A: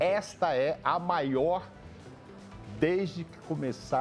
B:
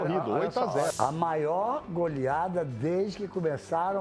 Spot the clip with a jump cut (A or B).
B